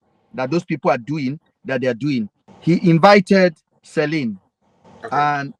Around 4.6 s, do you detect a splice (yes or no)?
no